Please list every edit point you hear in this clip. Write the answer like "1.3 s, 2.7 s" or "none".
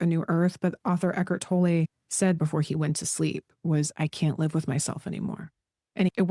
2.4 s